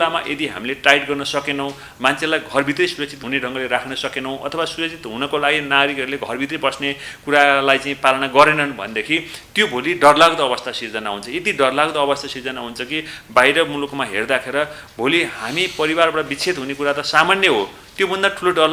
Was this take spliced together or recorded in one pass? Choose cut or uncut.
uncut